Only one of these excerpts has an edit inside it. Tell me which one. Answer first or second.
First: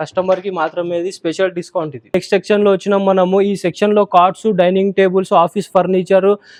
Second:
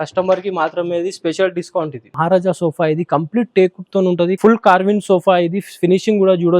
second